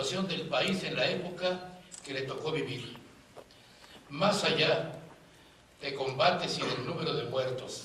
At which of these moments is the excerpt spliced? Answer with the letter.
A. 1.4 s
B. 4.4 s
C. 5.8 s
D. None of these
A